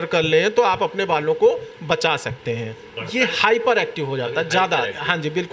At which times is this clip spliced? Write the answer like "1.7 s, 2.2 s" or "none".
2.9 s